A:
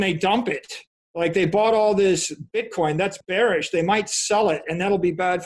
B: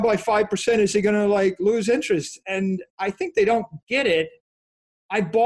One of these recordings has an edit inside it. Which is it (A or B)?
A